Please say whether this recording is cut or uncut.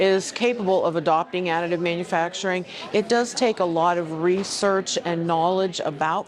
uncut